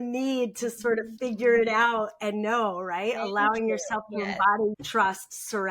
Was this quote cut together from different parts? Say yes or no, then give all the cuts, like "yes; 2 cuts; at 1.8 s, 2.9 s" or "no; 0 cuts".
yes; 1 cut; at 4.8 s